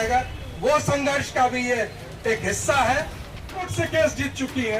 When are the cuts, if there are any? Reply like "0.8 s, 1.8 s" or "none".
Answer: 3.7 s